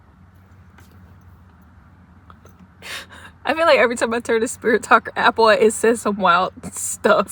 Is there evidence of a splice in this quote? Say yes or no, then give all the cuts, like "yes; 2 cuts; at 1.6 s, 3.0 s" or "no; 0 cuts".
no; 0 cuts